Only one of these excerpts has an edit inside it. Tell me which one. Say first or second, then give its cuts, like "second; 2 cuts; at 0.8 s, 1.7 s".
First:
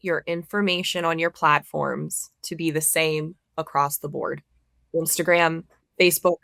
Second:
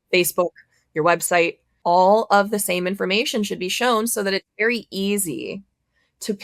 second; 1 cut; at 1.7 s